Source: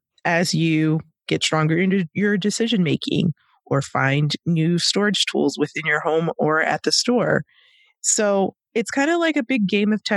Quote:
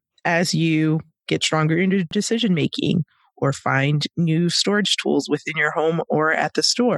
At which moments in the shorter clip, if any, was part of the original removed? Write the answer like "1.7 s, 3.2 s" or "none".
2.1 s

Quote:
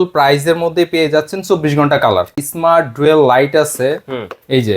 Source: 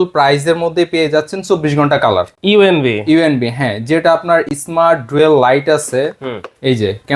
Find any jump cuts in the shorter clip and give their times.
2.4 s

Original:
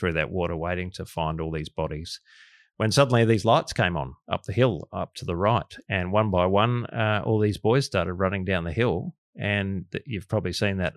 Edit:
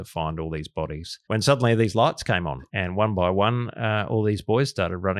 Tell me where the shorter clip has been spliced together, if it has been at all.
1.1 s, 2.6 s

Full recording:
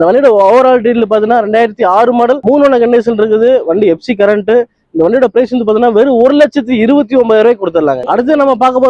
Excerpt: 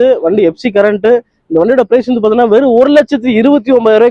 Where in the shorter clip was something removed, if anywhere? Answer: none

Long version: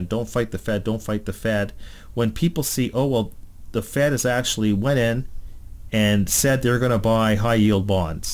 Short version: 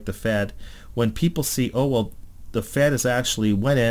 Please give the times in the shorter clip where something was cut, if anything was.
none

